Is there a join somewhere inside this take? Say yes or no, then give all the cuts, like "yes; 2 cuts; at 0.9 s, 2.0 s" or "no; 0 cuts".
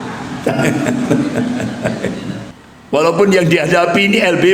yes; 1 cut; at 2.5 s